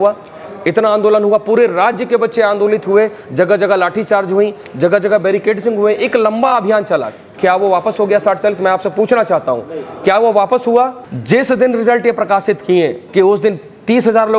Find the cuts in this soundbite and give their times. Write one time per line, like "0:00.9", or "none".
0:11.1
0:13.0